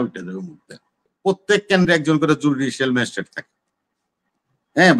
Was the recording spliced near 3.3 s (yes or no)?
no